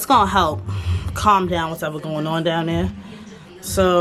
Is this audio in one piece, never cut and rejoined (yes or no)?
yes